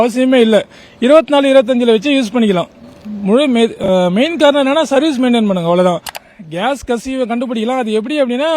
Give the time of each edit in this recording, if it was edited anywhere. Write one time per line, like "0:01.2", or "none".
0:06.1